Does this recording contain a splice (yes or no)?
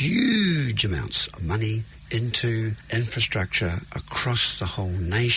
yes